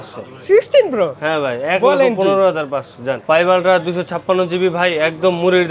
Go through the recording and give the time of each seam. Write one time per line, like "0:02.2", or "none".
0:03.2